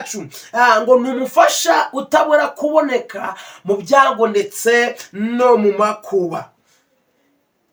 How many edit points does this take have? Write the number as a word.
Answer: zero